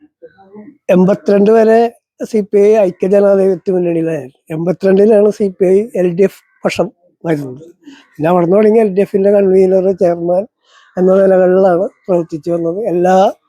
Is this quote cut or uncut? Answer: uncut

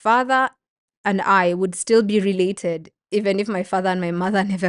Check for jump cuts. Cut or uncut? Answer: uncut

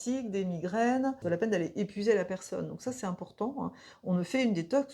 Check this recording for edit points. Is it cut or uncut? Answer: cut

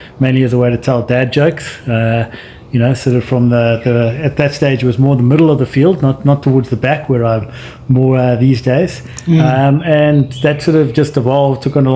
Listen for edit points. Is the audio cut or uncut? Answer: uncut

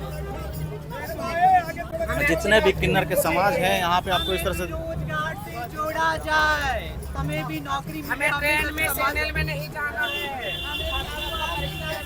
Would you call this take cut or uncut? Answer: uncut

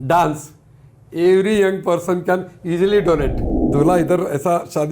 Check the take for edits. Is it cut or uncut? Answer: cut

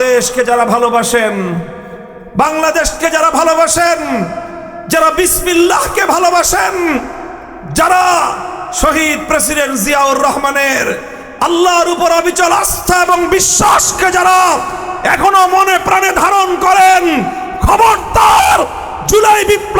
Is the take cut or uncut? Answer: uncut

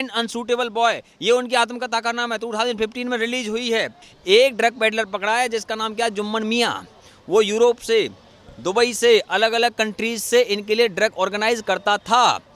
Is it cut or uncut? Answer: cut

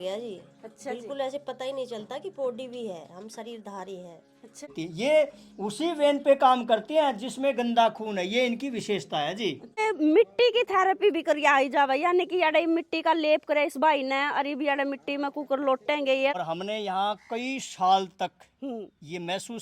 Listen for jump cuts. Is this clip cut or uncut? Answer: cut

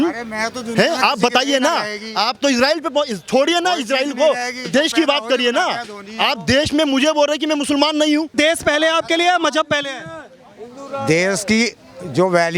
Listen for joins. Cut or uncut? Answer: cut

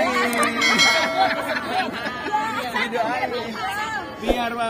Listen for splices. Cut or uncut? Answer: uncut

